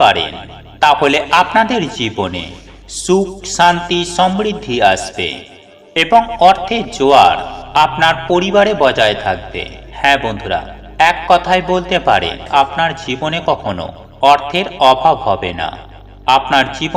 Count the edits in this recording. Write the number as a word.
one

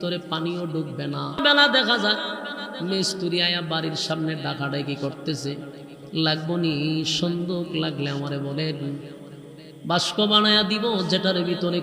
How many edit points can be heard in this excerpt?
one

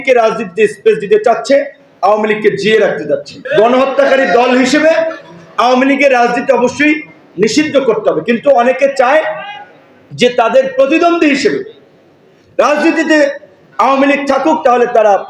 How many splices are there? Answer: one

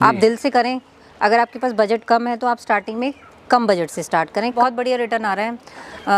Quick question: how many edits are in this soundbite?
one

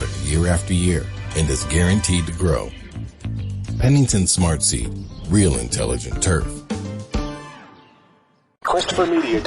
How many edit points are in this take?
one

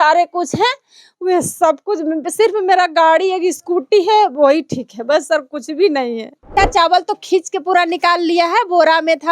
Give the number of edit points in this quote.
one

